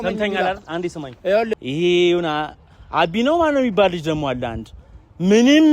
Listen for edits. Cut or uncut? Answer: cut